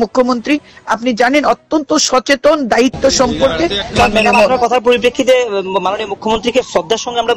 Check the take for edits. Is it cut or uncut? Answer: cut